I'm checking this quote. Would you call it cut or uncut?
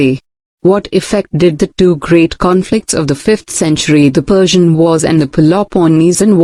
uncut